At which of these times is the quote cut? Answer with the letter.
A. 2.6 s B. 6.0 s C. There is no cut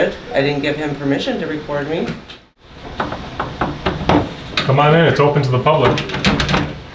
A